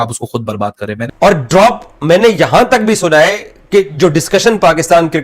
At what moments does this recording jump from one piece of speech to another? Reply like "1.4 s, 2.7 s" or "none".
1.0 s